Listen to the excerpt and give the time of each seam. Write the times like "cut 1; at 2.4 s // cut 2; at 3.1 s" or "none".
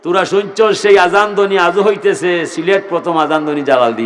none